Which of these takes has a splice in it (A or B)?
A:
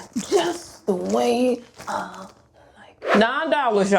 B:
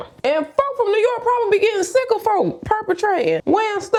A